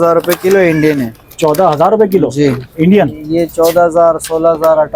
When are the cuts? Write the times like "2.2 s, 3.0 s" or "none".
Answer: none

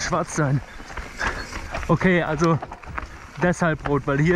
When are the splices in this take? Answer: 1.6 s

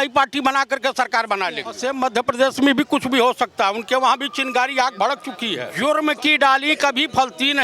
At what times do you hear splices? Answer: 1.7 s, 5.6 s

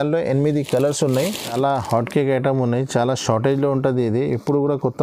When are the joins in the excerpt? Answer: 1.5 s

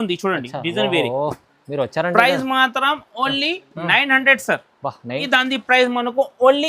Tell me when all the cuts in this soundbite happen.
5.1 s

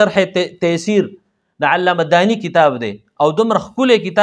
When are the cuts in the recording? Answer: none

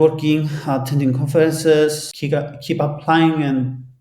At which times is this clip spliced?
2.1 s

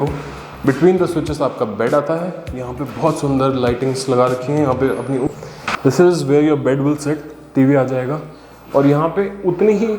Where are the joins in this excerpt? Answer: 5.3 s

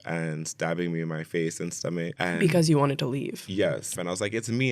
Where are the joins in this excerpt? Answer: 2.1 s, 3.9 s

